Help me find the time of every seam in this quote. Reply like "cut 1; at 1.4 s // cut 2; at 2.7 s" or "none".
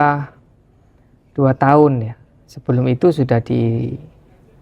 none